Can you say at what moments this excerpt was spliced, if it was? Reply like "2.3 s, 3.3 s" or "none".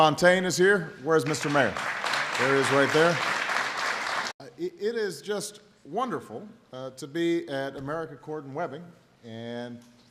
none